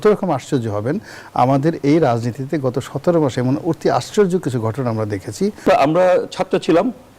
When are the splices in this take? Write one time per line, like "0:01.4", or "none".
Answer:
0:05.6